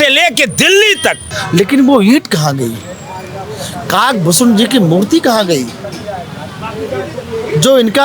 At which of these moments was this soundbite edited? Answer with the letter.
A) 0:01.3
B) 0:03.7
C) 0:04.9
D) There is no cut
A